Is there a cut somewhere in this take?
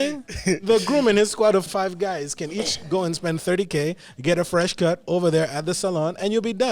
yes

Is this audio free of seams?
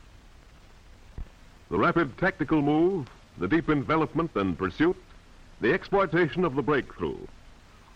no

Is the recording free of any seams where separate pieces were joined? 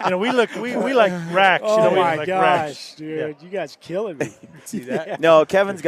no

